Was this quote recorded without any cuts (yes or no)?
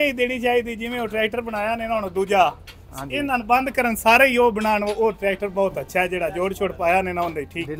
yes